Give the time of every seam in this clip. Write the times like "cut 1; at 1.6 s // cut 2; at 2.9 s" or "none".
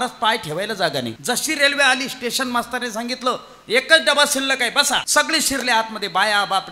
cut 1; at 1.2 s // cut 2; at 5.1 s